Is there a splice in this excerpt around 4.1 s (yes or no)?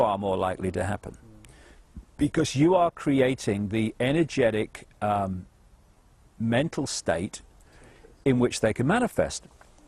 yes